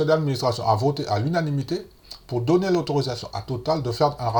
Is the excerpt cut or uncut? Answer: uncut